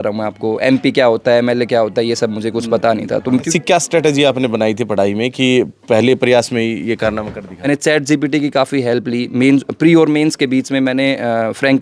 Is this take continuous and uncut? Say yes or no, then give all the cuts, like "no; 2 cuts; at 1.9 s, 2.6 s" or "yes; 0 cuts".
no; 2 cuts; at 3.5 s, 7.5 s